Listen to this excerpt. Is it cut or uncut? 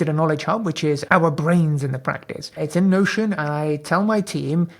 cut